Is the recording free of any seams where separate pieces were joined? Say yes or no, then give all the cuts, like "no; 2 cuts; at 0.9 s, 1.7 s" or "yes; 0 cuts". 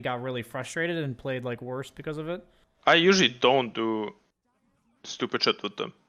yes; 0 cuts